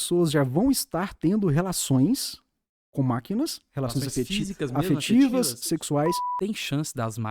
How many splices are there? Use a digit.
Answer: 1